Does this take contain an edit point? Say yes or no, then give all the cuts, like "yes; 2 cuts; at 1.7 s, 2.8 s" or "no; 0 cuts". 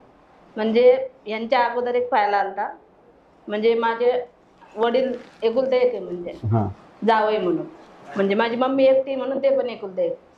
no; 0 cuts